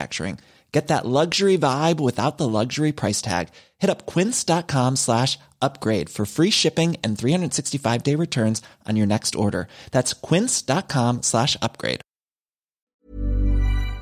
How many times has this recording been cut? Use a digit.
1